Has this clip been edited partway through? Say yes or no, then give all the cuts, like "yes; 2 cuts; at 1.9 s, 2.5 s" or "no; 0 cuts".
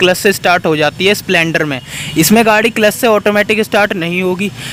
no; 0 cuts